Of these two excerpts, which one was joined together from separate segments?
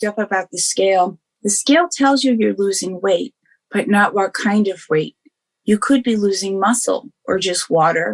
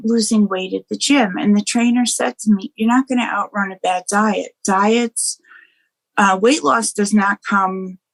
first; 1 cut; at 1.3 s

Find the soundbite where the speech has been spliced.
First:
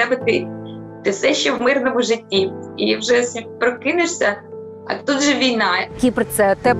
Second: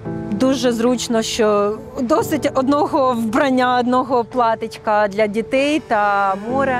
first; 2 cuts; at 2.7 s, 5.9 s

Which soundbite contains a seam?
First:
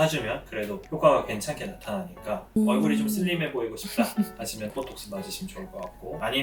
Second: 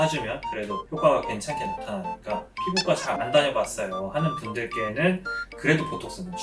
second; 1 cut; at 2.5 s

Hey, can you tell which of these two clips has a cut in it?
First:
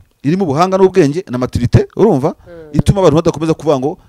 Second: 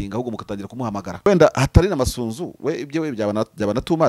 second; 1 cut; at 1.3 s

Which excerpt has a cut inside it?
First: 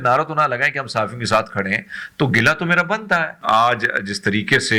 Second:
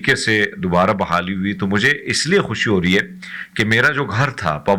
first; 1 cut; at 3.3 s

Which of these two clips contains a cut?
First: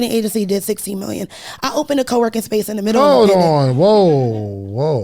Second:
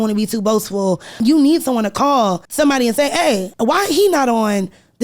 second; 3 cuts; at 1.2 s, 2.4 s, 3.5 s

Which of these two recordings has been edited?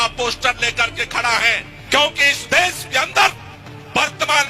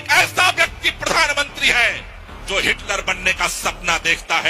first; 1 cut; at 1.7 s

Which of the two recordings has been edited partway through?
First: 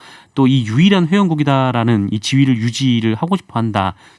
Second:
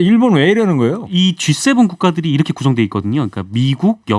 second; 1 cut; at 1.1 s

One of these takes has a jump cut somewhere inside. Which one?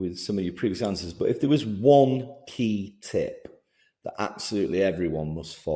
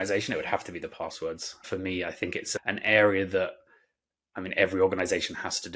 second; 2 cuts; at 1.6 s, 2.5 s

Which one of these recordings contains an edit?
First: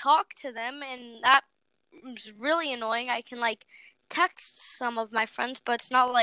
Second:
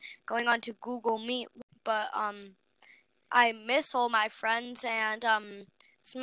second; 1 cut; at 1.6 s

